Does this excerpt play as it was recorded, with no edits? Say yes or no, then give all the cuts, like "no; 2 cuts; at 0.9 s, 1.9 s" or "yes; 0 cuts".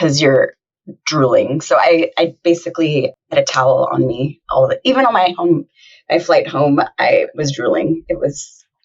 no; 1 cut; at 3.3 s